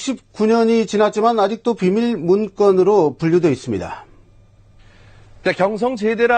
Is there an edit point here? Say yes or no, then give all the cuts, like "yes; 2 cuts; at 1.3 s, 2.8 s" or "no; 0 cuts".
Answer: yes; 1 cut; at 1.5 s